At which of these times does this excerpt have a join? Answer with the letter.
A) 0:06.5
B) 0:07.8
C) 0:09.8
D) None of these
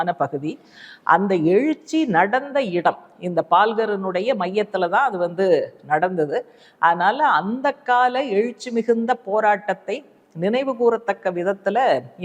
D